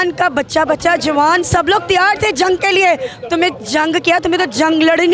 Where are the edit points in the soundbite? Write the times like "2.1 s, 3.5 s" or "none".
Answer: none